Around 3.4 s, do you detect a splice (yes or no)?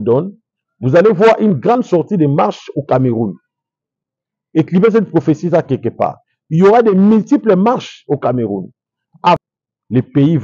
no